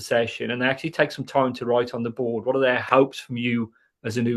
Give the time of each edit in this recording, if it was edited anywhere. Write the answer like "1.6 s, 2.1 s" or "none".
none

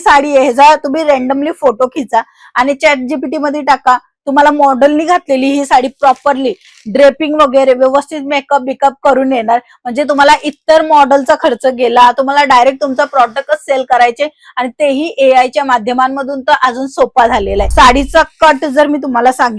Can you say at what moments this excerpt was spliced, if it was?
17.7 s

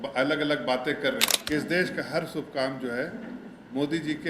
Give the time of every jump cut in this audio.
1.3 s

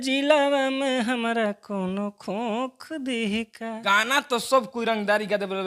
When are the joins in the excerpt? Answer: 3.9 s

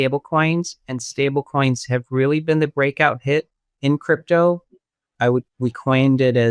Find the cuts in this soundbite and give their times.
5.5 s

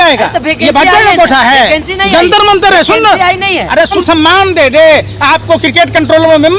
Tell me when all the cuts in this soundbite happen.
4.0 s

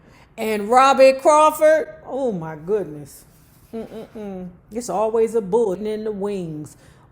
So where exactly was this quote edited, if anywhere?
5.8 s

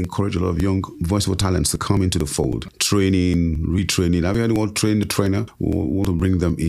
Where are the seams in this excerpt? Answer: 0.9 s, 2.7 s, 5.5 s

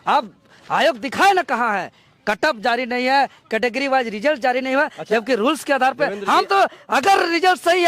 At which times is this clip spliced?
none

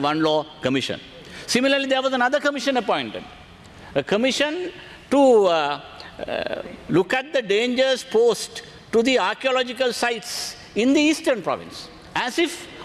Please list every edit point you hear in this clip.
none

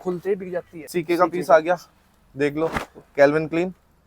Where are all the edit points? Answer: 0.9 s

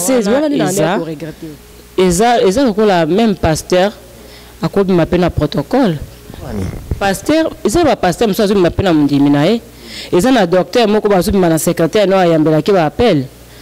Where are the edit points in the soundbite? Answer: 1.2 s

